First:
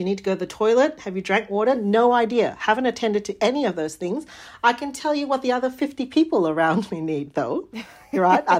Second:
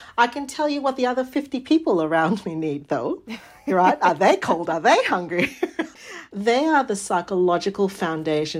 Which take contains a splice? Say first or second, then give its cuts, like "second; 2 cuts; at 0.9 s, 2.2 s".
second; 1 cut; at 5.9 s